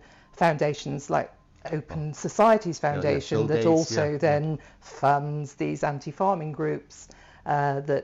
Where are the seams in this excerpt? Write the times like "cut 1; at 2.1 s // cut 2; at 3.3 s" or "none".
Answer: none